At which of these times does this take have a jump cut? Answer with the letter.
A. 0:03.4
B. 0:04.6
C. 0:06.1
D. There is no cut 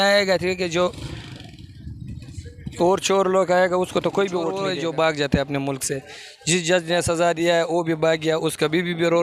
B